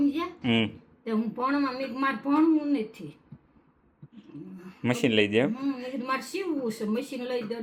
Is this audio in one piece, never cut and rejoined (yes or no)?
yes